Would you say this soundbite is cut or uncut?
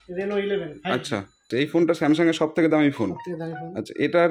cut